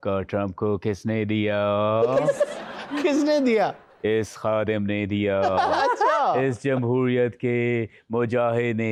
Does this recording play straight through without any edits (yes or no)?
yes